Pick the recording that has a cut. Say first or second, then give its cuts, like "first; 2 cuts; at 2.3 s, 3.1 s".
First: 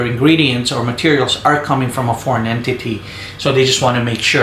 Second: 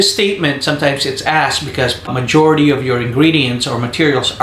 second; 1 cut; at 2.0 s